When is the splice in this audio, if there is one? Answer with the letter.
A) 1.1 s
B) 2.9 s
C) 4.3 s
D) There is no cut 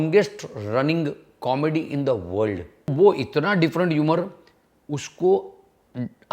B